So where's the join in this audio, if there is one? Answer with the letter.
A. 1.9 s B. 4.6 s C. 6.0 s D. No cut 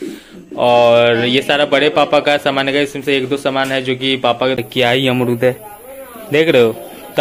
B